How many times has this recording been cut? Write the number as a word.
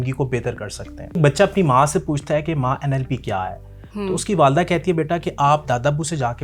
one